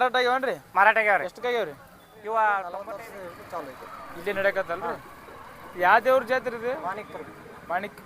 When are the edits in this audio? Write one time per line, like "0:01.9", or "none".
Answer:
0:02.8